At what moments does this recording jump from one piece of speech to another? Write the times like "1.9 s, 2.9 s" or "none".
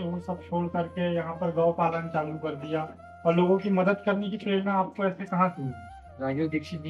none